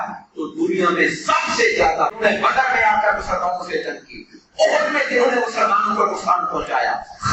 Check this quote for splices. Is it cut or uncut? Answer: cut